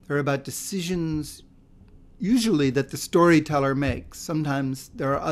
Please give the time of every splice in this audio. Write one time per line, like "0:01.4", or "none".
none